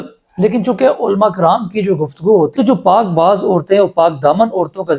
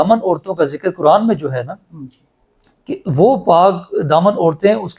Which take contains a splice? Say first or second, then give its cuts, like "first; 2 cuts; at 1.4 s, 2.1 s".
first; 1 cut; at 2.5 s